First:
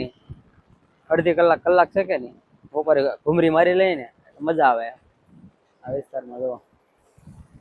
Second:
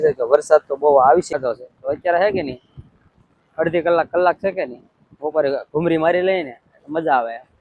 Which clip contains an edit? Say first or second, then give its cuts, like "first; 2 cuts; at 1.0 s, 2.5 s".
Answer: second; 1 cut; at 1.3 s